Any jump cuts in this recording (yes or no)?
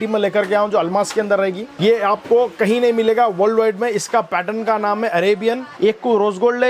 yes